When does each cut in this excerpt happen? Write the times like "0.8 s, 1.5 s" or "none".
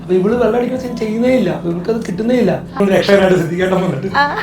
2.8 s

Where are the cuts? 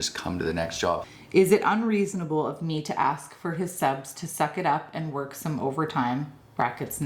1.0 s

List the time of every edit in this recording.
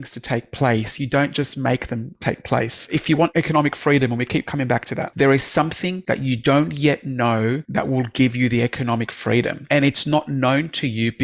3.1 s, 5.0 s, 5.9 s, 7.6 s, 9.6 s

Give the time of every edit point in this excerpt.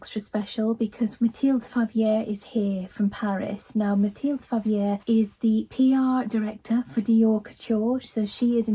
1.1 s

